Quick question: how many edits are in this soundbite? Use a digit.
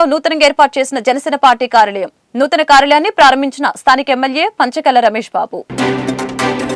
0